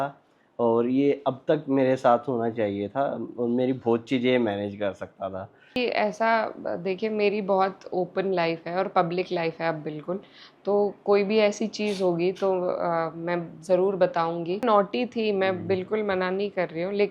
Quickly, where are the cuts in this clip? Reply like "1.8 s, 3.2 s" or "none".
5.8 s, 14.6 s

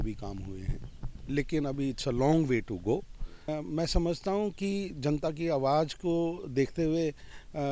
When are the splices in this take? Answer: 3.5 s

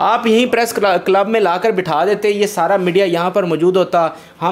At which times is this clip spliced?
none

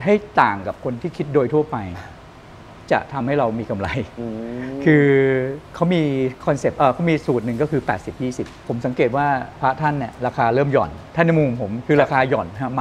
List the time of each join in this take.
5.6 s, 8.6 s, 11.0 s

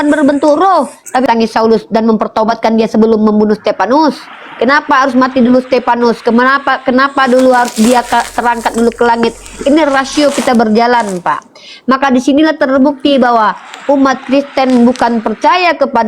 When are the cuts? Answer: 1.2 s

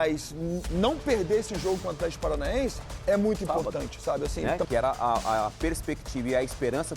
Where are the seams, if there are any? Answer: 4.5 s

